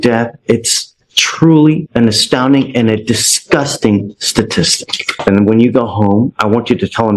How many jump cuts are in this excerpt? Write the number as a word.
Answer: one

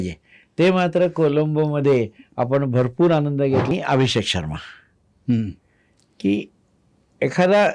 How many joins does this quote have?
one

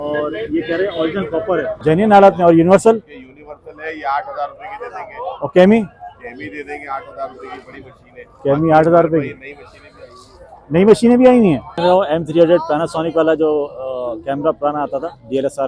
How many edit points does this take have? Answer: two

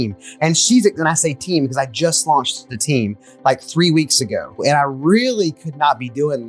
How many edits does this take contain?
one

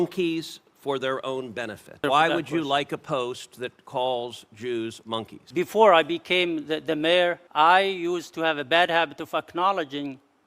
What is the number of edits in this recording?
three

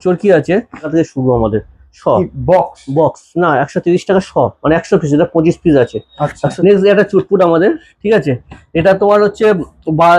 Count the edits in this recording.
two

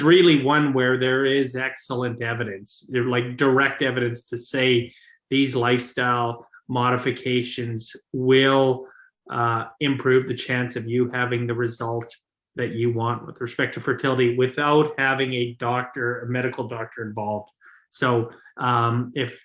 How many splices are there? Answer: zero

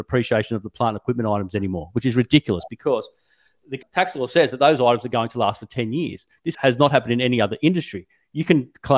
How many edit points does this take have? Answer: one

